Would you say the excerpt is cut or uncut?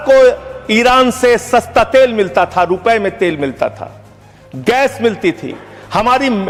uncut